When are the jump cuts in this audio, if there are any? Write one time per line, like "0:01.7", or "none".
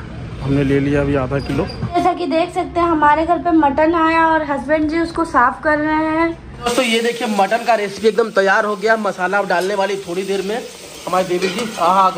0:01.9
0:06.7

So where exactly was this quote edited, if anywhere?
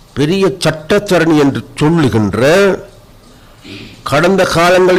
none

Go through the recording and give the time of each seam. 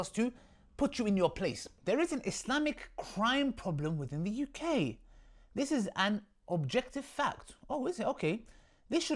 0:01.7

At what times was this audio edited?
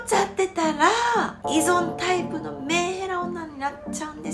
none

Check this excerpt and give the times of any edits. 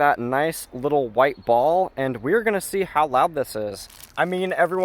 0:03.8

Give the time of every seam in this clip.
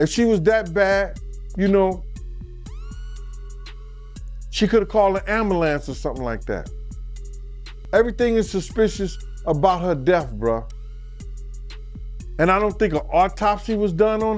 0:11.1
0:12.3

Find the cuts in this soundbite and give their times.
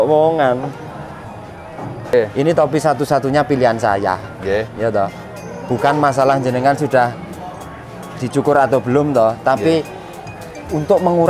0:02.1

